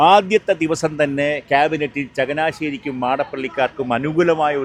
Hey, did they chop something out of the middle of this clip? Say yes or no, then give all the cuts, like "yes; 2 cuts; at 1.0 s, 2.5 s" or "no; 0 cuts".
no; 0 cuts